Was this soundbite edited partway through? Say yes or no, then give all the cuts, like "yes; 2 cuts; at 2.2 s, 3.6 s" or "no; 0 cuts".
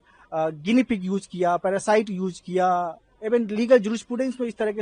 no; 0 cuts